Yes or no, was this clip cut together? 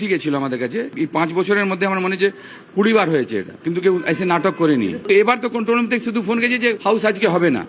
yes